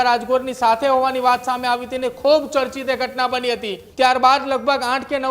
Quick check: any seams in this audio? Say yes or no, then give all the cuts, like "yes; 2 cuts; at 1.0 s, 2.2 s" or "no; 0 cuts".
yes; 1 cut; at 3.8 s